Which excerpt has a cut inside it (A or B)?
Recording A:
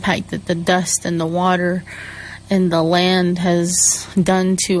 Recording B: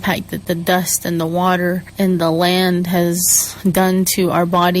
B